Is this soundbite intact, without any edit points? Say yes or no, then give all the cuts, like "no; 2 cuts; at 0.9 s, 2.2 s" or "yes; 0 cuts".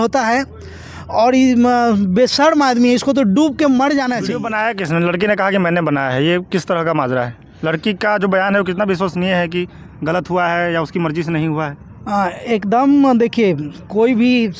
no; 1 cut; at 4.4 s